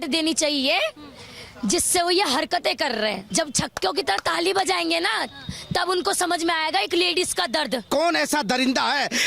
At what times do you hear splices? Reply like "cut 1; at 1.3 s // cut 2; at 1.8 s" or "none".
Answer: cut 1; at 3.3 s // cut 2; at 7.8 s